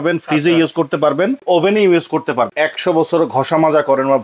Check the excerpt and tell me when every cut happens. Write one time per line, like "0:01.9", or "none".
0:01.4
0:02.5